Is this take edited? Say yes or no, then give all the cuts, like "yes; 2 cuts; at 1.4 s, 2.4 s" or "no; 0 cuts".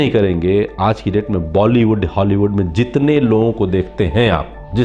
no; 0 cuts